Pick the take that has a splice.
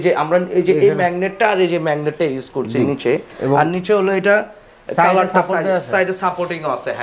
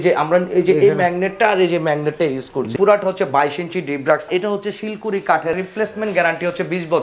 second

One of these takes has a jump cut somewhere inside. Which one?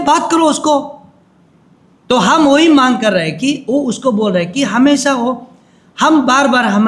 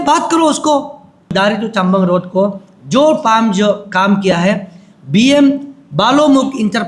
second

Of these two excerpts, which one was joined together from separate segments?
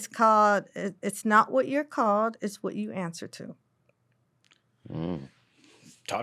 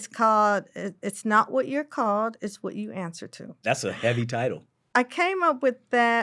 second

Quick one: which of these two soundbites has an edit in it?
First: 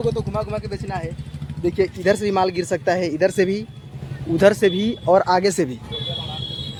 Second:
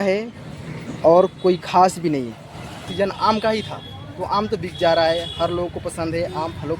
second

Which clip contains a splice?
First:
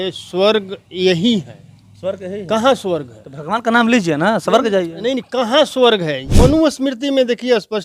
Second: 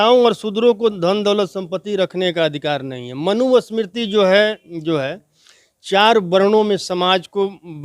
first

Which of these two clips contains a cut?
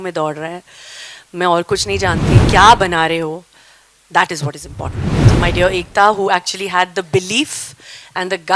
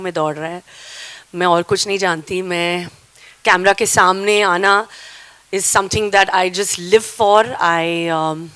first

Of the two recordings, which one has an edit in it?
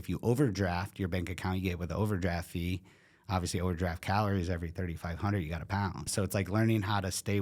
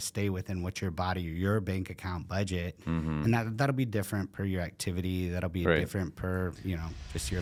first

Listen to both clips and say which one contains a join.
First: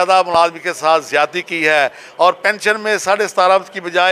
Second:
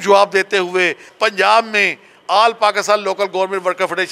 second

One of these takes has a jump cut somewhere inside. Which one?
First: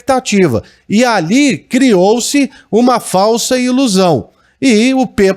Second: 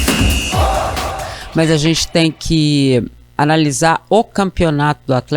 second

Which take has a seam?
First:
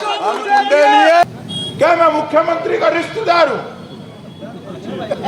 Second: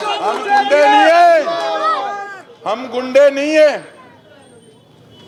first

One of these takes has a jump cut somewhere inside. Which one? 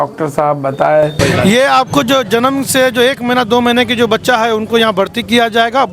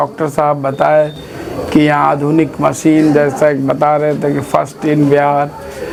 first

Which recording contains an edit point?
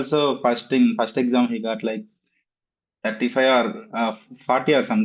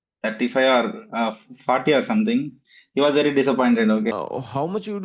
second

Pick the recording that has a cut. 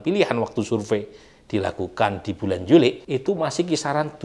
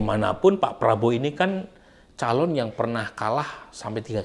first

